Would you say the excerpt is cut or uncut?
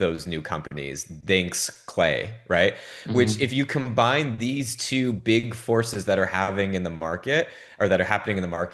uncut